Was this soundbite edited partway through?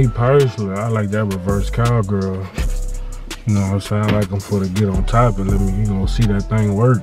no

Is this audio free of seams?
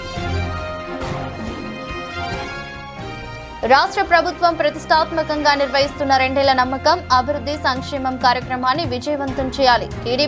no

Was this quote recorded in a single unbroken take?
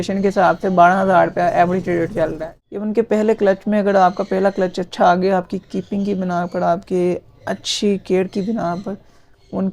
no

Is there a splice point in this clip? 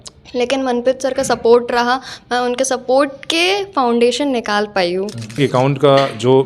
yes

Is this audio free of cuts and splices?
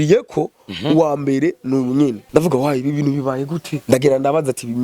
no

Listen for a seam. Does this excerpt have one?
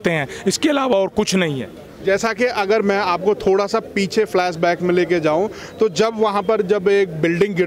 no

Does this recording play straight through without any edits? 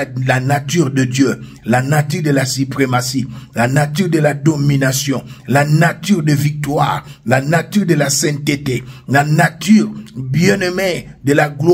yes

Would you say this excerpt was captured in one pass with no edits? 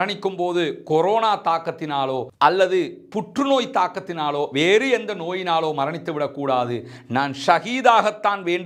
yes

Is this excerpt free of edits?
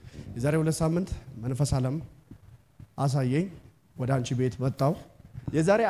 yes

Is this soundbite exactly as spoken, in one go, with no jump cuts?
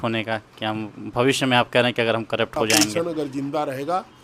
no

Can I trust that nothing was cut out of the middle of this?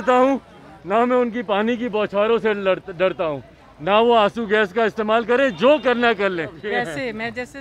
no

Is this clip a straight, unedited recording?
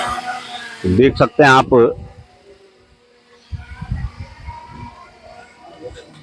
yes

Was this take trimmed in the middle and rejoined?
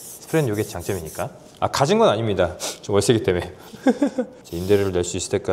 yes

